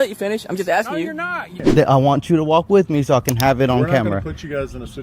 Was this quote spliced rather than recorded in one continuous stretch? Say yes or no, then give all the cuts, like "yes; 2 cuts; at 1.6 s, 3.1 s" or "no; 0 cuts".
yes; 1 cut; at 1.6 s